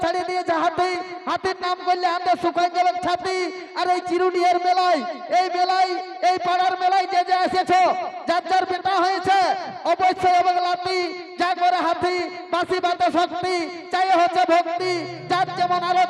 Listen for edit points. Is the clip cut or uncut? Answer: uncut